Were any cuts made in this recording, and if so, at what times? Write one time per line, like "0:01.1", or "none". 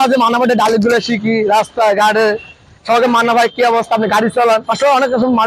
none